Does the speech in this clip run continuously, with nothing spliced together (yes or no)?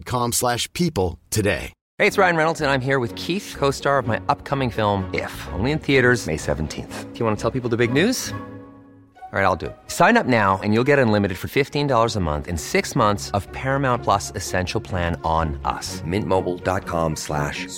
no